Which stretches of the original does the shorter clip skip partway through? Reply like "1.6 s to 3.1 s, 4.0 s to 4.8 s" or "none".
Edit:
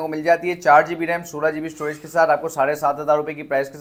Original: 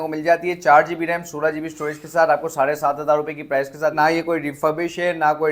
none